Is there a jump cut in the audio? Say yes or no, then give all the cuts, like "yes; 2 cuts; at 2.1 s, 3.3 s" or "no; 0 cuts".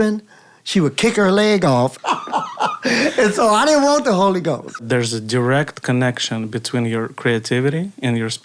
yes; 2 cuts; at 2.0 s, 4.8 s